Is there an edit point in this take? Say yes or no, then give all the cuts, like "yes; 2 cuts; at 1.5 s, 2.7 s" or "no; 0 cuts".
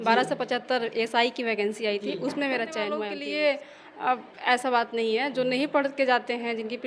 yes; 1 cut; at 3.1 s